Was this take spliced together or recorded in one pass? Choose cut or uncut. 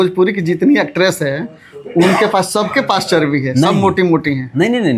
uncut